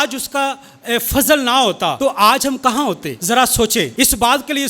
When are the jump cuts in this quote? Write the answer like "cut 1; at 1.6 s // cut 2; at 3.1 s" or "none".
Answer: cut 1; at 2.0 s // cut 2; at 3.1 s // cut 3; at 3.9 s